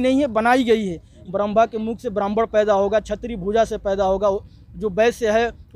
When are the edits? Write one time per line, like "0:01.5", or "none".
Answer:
0:01.1